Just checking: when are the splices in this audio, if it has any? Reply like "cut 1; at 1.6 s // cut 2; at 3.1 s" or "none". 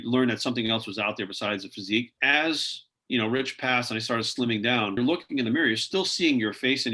cut 1; at 2.1 s // cut 2; at 5.0 s